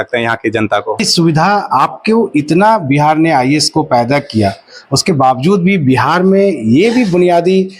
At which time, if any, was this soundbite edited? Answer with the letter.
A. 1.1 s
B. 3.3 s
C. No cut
A